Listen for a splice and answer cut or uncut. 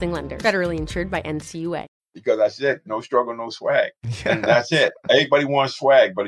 cut